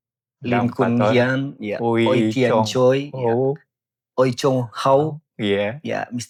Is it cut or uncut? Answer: uncut